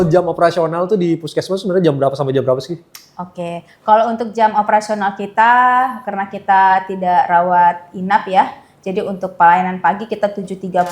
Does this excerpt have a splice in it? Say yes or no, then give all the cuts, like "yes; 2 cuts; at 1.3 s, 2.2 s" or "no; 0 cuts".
no; 0 cuts